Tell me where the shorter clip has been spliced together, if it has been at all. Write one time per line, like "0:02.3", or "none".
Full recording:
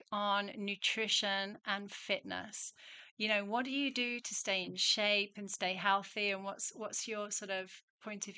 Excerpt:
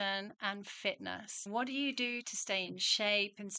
0:01.5